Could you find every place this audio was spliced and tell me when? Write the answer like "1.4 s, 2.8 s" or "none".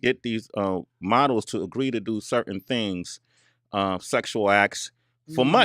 4.3 s